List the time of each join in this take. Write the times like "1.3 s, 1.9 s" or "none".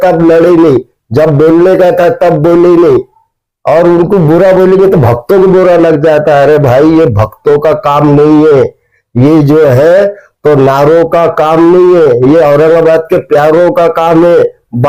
none